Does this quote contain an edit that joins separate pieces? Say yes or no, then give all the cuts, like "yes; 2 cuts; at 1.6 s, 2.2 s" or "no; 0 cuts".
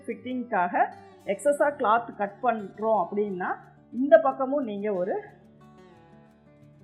no; 0 cuts